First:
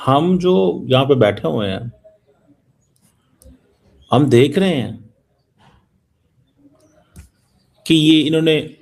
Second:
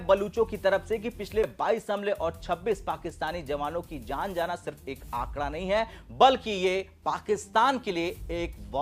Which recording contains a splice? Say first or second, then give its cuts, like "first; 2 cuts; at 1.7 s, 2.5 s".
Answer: second; 1 cut; at 1.5 s